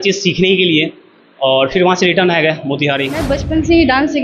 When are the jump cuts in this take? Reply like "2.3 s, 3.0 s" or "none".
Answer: 3.3 s